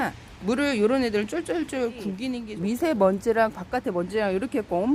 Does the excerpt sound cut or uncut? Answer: cut